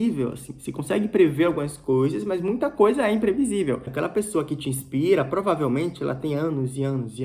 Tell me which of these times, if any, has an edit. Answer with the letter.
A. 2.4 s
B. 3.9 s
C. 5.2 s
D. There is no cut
B